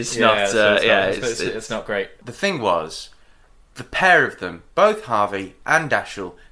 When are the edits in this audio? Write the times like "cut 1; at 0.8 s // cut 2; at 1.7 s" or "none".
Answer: cut 1; at 2.2 s